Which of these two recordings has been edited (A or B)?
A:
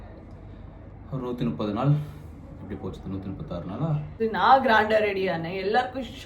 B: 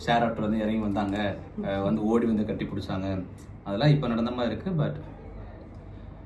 A